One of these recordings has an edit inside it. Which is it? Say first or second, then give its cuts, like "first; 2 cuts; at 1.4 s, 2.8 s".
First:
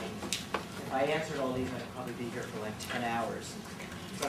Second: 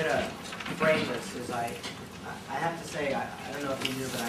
second; 1 cut; at 1.7 s